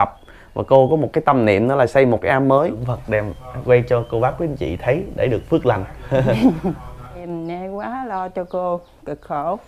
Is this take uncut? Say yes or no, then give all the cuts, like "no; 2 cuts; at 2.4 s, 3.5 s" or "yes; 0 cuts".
no; 2 cuts; at 2.9 s, 7.2 s